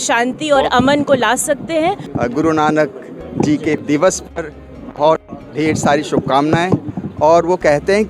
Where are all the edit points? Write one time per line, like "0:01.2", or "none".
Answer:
0:02.1
0:03.8

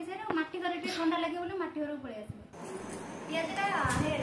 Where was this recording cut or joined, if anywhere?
0:02.6

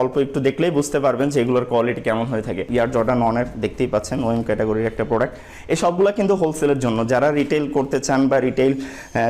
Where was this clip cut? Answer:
0:02.6

